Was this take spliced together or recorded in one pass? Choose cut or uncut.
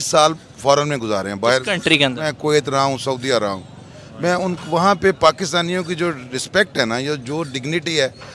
uncut